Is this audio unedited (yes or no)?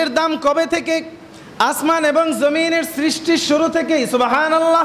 yes